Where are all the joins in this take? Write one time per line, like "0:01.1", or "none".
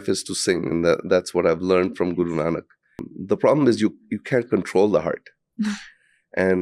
0:03.1